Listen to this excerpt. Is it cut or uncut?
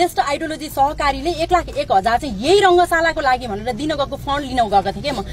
uncut